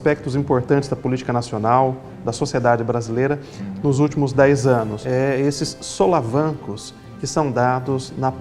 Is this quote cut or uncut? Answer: cut